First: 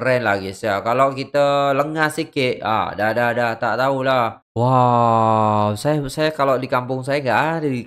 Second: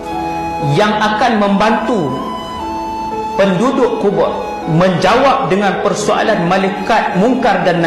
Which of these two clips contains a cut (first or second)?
first